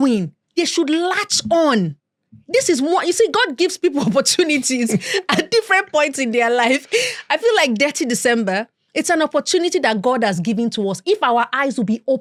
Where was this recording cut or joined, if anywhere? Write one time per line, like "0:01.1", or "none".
none